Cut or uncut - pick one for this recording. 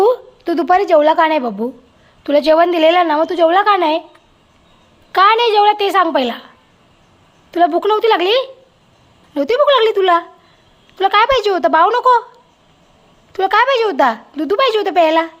uncut